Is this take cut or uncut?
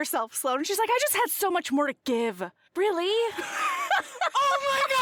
uncut